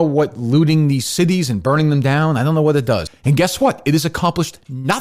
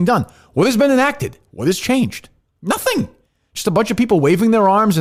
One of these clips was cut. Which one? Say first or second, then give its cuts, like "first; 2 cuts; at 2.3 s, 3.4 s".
first; 1 cut; at 3.1 s